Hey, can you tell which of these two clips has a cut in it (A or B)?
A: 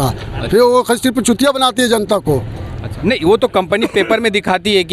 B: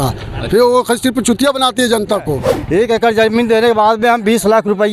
B